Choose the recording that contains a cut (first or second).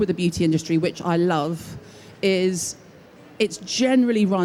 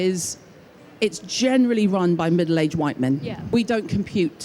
second